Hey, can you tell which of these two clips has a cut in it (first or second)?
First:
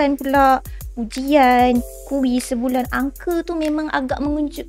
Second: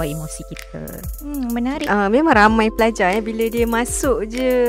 second